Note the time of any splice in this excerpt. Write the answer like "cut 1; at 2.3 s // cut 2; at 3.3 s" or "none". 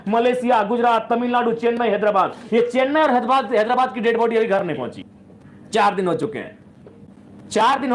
none